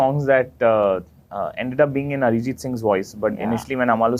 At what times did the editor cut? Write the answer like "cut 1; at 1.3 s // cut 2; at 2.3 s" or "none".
none